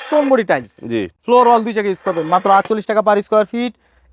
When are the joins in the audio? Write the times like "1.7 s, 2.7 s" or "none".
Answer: none